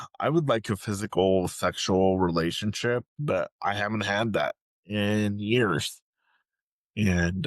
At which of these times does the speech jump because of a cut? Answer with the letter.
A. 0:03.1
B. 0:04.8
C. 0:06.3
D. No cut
A